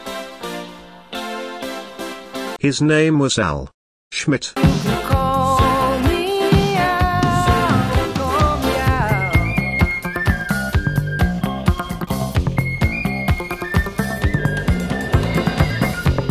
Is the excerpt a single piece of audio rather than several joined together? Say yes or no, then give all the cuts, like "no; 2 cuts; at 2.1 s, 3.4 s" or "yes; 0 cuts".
yes; 0 cuts